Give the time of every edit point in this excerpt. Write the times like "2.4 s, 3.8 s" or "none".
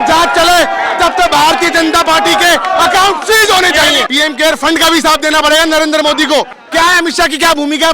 4.0 s, 6.6 s

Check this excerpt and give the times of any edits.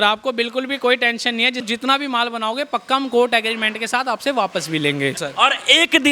1.6 s, 5.2 s

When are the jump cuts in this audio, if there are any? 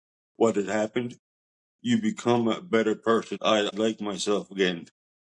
3.7 s

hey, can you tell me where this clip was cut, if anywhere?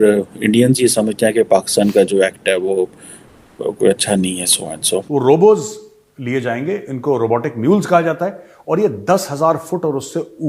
5.0 s

